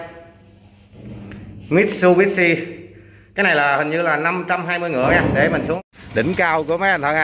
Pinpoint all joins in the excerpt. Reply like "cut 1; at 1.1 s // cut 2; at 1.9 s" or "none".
cut 1; at 5.8 s